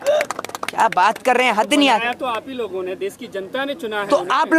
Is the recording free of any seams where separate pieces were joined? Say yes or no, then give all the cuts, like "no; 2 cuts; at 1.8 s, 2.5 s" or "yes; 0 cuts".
yes; 0 cuts